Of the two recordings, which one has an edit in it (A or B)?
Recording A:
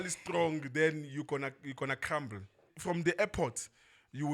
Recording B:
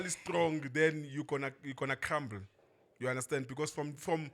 A